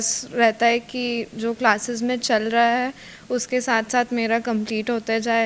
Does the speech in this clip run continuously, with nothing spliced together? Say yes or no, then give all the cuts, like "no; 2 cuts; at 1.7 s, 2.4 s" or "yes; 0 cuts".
yes; 0 cuts